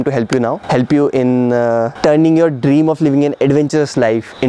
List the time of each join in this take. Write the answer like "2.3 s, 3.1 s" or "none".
none